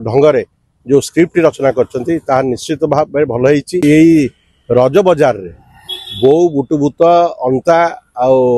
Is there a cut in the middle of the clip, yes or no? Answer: yes